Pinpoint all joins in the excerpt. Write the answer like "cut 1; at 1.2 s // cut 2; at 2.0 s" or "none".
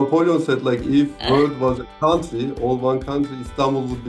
cut 1; at 1.2 s